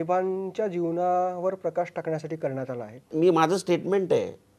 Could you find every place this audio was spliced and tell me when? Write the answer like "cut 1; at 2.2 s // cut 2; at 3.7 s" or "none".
cut 1; at 3.1 s